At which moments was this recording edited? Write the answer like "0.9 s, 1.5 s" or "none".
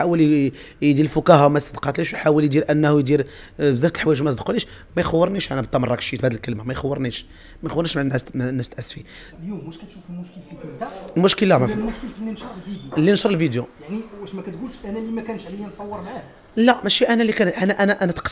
none